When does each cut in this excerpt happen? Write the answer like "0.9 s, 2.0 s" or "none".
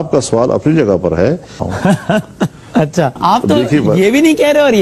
none

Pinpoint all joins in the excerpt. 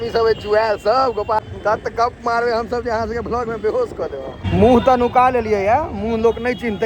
1.4 s, 4.4 s

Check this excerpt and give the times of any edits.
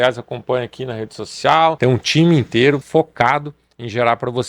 1.8 s, 2.8 s

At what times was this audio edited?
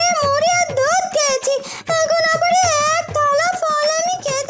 none

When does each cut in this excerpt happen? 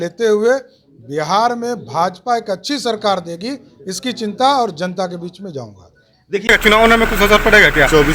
6.5 s

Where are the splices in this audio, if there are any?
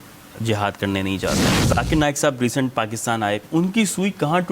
1.5 s, 3.4 s

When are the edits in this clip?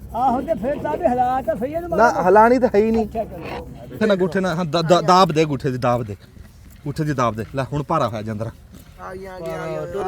4.0 s

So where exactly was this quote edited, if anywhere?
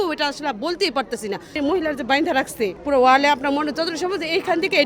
1.6 s, 2.8 s

